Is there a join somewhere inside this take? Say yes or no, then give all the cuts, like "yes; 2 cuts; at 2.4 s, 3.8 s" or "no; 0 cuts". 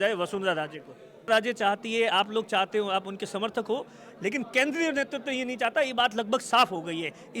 yes; 1 cut; at 1.3 s